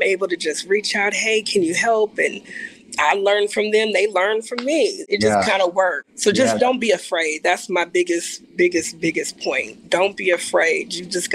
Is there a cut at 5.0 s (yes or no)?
yes